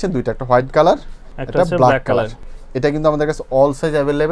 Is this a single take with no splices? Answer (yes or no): yes